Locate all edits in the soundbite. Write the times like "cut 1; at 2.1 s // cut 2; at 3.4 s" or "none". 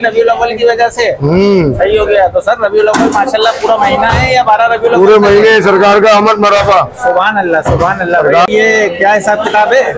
cut 1; at 8.5 s